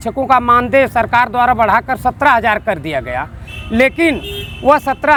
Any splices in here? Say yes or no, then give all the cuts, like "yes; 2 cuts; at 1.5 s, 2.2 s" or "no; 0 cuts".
no; 0 cuts